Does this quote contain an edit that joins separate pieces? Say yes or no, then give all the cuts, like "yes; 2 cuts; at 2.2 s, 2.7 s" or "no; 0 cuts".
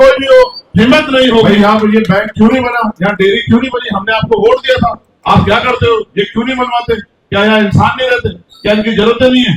yes; 1 cut; at 1.5 s